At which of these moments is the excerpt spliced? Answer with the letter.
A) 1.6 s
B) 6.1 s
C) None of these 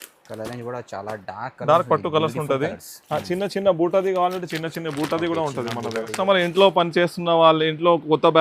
B